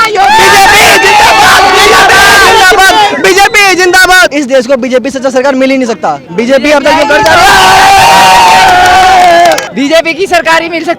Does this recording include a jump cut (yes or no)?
no